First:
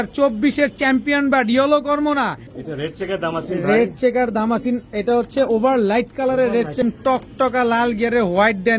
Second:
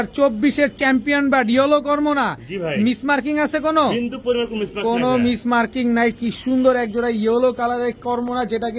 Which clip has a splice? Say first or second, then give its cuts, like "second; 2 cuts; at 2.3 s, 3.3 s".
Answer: first; 2 cuts; at 2.5 s, 6.8 s